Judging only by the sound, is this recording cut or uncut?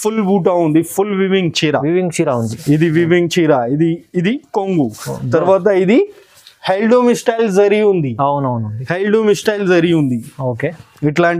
uncut